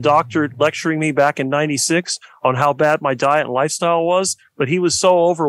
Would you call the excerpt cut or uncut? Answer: uncut